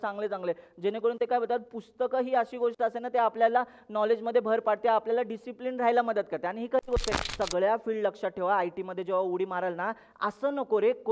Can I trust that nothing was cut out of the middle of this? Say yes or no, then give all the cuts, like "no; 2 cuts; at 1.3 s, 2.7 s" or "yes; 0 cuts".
no; 1 cut; at 7.2 s